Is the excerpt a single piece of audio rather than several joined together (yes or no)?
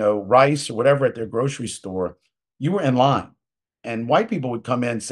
yes